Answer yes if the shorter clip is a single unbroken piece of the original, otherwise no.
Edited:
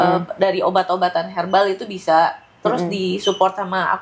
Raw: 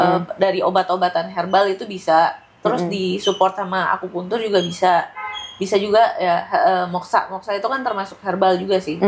yes